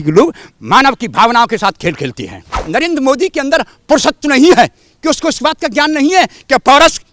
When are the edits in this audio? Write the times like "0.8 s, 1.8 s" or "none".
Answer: 2.6 s